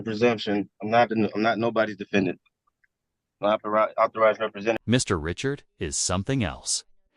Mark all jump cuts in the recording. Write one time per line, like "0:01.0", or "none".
none